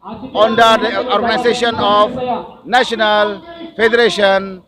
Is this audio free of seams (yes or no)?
yes